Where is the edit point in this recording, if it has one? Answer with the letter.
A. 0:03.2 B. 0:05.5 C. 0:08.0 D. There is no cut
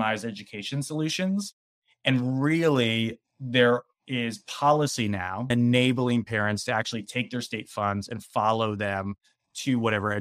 B